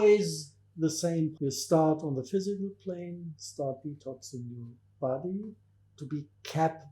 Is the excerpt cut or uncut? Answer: cut